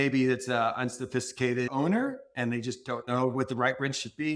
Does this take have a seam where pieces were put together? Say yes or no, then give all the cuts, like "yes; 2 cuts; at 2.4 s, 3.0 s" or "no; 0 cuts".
yes; 1 cut; at 1.7 s